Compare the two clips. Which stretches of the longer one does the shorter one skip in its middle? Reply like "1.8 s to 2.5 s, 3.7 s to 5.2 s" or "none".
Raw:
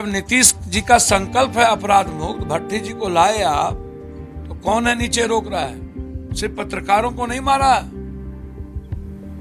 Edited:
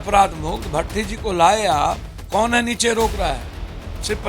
3.9 s to 4.4 s